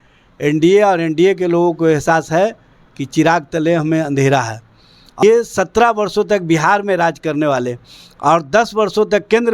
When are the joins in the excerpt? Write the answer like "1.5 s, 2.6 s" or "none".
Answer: 5.2 s